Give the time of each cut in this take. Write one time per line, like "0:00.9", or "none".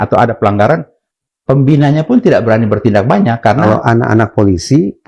0:03.6